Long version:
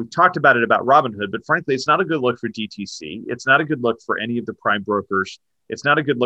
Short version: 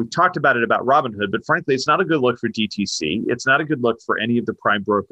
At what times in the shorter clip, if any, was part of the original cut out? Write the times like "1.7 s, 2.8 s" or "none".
none